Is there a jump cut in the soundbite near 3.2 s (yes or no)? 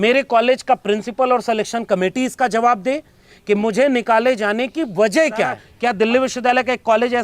no